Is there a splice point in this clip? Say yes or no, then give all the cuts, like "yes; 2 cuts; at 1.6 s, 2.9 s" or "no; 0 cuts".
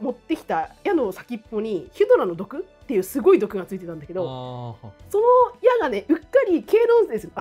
no; 0 cuts